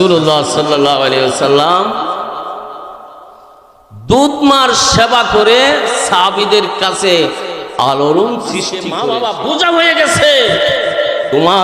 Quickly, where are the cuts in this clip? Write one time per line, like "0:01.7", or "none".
0:08.8